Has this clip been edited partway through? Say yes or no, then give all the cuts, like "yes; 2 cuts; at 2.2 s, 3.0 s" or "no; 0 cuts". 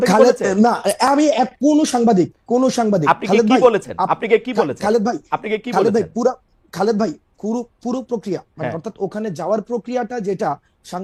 no; 0 cuts